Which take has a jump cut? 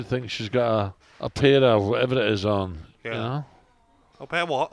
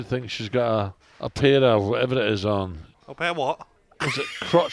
second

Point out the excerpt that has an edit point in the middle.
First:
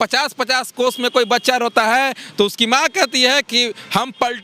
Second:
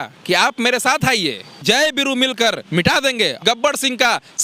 second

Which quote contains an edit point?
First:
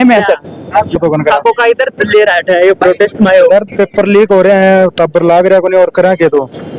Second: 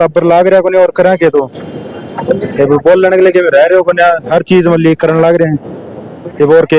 first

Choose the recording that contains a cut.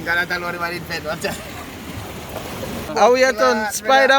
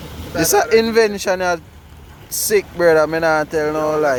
first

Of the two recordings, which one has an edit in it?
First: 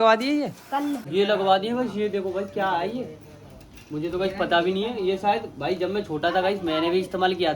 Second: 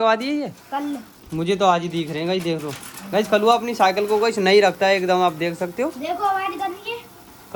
first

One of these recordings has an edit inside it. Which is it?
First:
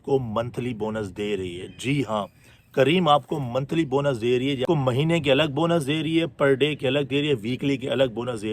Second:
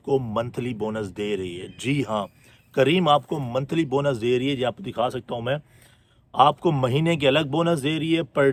first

